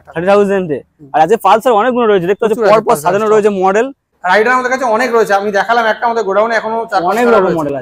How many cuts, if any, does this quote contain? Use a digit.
1